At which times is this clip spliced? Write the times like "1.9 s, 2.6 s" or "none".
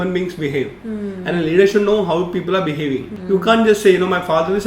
3.1 s